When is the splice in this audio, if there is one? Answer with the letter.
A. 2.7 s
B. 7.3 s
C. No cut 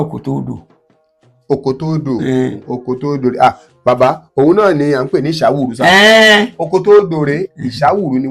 A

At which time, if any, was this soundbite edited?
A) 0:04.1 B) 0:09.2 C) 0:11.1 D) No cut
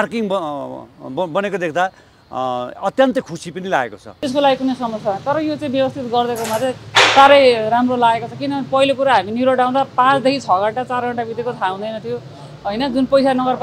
A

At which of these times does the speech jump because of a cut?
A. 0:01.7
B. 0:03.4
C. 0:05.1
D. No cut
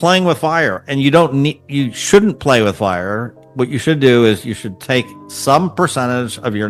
D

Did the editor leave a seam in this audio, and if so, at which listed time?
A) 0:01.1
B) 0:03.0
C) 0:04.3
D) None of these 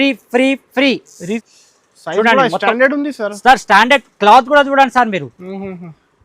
A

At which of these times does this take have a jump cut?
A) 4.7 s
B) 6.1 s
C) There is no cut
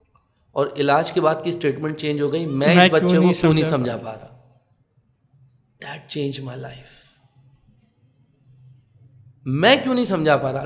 C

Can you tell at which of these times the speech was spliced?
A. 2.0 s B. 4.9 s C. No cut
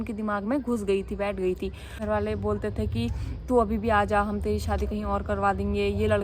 A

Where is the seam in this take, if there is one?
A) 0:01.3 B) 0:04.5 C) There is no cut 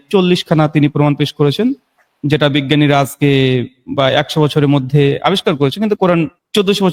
C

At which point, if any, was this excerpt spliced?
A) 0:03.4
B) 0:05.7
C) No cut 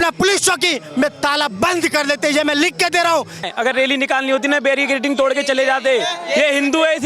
A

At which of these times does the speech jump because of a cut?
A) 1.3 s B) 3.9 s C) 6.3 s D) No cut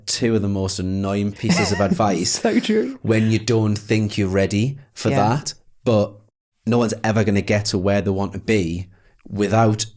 A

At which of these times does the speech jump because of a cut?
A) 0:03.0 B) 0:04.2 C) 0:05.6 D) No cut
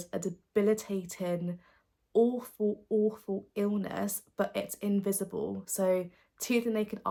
D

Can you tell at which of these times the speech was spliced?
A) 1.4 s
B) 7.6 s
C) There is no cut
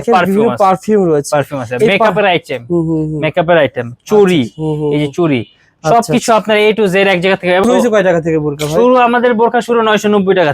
B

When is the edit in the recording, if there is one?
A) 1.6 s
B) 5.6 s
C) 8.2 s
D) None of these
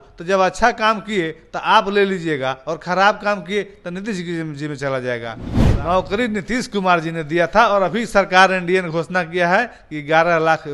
B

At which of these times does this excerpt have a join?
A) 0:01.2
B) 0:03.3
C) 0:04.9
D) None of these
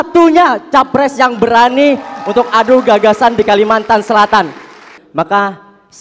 C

